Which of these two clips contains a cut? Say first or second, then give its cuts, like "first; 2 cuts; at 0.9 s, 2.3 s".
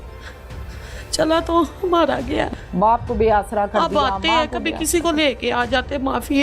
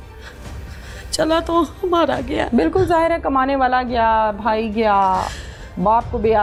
first; 1 cut; at 2.5 s